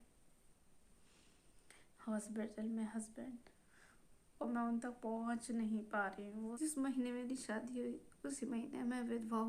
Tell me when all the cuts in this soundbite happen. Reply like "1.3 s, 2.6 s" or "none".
6.5 s